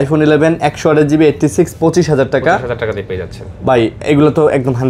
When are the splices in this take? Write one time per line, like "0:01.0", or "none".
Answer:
none